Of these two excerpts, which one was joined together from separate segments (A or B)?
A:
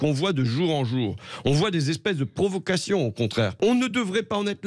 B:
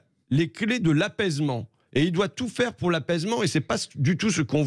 A